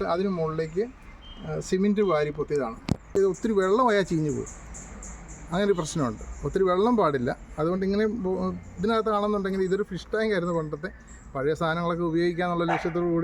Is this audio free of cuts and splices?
no; 1 cut; at 3.1 s

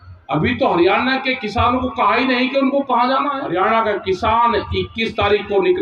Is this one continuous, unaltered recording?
no; 1 cut; at 3.4 s

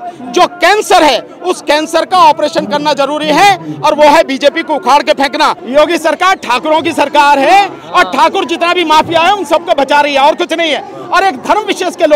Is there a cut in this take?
yes; 1 cut; at 5.6 s

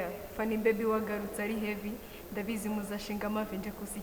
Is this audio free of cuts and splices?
yes; 0 cuts

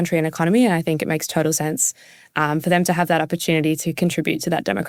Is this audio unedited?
yes; 0 cuts

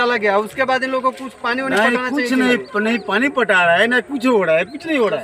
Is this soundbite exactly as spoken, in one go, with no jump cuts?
yes; 0 cuts

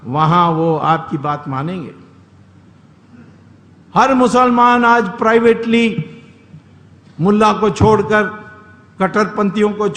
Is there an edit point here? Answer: no; 0 cuts

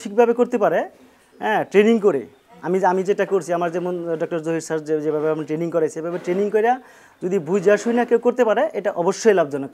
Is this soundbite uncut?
yes; 0 cuts

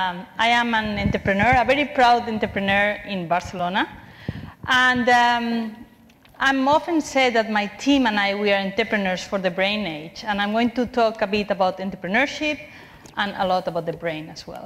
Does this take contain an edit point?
no; 0 cuts

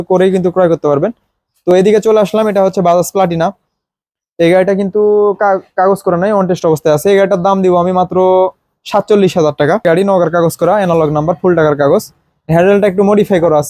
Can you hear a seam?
yes; 1 cut; at 9.8 s

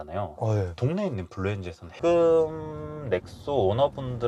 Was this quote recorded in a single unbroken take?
no; 1 cut; at 1.8 s

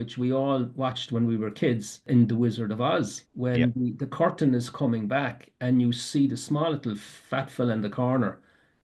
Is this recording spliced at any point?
yes; 2 cuts; at 2.0 s, 3.2 s

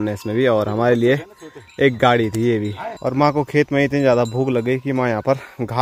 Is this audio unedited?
yes; 0 cuts

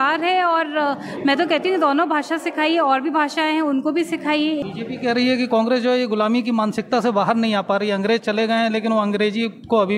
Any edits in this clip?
yes; 1 cut; at 4.6 s

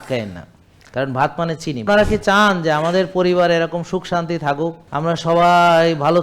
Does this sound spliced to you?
yes; 2 cuts; at 1.8 s, 4.8 s

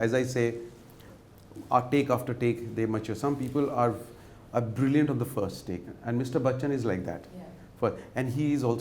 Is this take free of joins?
yes; 0 cuts

